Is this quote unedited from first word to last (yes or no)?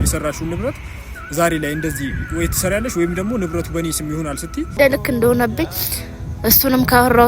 no